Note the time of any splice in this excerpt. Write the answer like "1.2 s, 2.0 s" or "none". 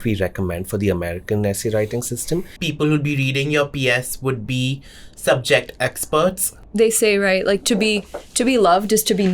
2.6 s, 6.6 s